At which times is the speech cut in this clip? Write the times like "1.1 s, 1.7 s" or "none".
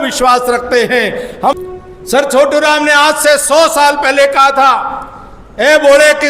1.6 s